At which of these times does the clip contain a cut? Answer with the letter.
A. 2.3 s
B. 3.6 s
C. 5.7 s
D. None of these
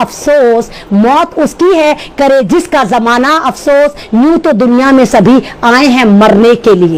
D